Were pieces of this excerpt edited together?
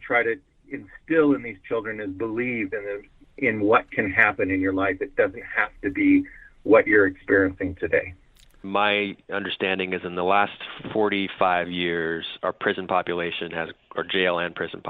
yes; 1 cut; at 8.5 s

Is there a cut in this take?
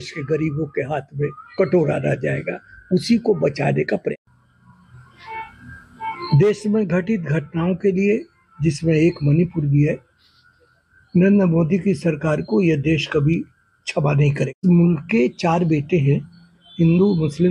yes; 2 cuts; at 4.1 s, 14.6 s

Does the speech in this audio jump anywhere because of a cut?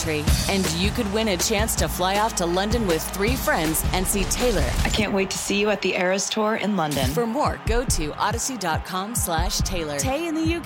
no; 0 cuts

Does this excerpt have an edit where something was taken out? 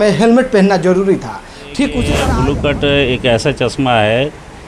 yes; 1 cut; at 2.2 s

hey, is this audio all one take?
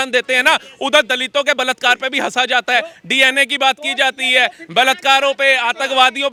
yes; 0 cuts

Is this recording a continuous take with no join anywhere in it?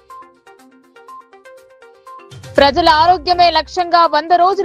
no; 2 cuts; at 1.3 s, 2.4 s

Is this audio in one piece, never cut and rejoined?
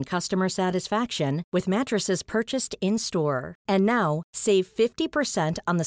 yes; 0 cuts

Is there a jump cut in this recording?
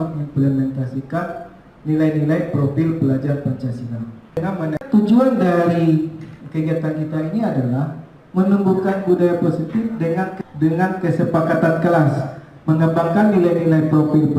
yes; 2 cuts; at 4.7 s, 10.3 s

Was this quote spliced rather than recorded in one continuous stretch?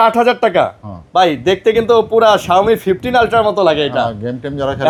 no; 0 cuts

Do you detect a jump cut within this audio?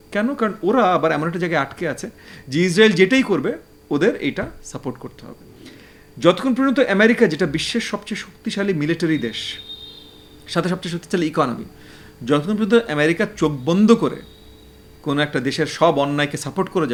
no; 0 cuts

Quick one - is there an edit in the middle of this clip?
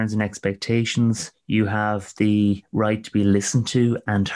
yes; 2 cuts; at 1.3 s, 2.7 s

